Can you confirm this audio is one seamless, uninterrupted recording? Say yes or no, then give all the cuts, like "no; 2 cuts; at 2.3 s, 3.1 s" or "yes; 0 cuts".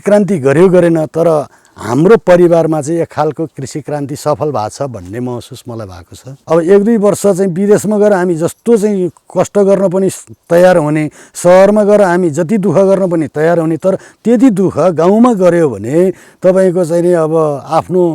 no; 1 cut; at 6.3 s